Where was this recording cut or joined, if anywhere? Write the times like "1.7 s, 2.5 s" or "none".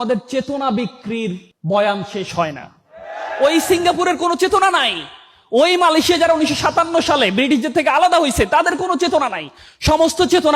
none